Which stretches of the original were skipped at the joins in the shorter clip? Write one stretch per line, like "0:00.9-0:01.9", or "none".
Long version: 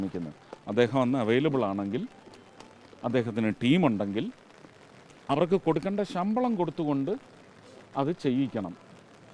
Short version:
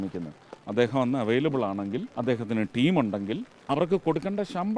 0:02.1-0:03.0
0:04.4-0:05.1